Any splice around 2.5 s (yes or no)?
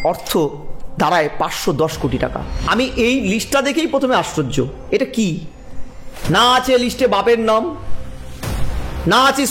yes